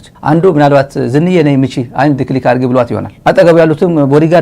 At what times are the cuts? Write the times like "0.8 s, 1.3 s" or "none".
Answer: 3.1 s